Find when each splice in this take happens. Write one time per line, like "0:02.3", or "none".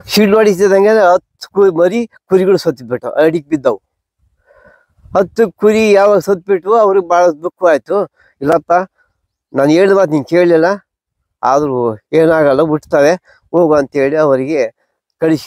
none